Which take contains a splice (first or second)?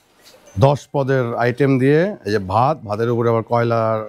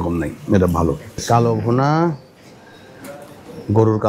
second